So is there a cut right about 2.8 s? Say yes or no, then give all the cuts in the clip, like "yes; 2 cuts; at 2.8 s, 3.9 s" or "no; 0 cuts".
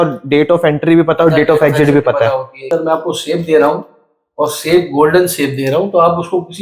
yes; 1 cut; at 2.8 s